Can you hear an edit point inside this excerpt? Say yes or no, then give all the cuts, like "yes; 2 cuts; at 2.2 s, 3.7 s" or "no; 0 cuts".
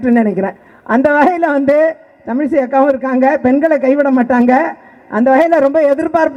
no; 0 cuts